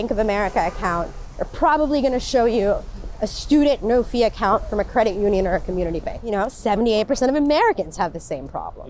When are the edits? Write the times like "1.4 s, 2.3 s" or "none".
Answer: 6.1 s